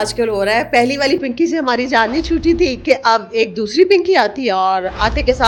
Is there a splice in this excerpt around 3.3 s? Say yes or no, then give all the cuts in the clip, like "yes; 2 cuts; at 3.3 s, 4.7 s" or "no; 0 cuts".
no; 0 cuts